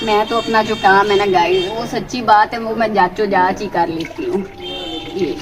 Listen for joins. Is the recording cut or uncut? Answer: uncut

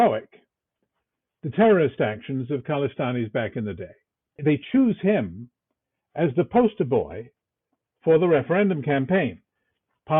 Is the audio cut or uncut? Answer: cut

